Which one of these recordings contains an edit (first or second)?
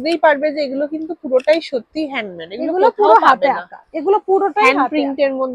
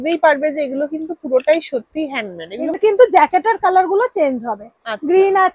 second